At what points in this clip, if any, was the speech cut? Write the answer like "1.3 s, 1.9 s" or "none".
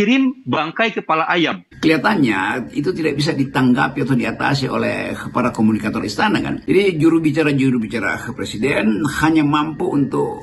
1.7 s